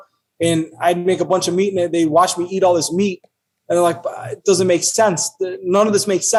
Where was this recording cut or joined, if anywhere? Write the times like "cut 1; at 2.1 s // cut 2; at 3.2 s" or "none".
none